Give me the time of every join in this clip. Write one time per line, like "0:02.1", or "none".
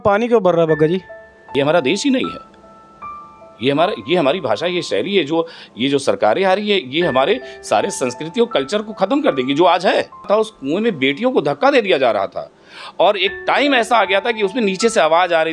0:01.4
0:10.3